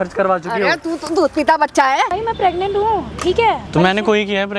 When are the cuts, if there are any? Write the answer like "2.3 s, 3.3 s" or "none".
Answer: 2.1 s, 3.6 s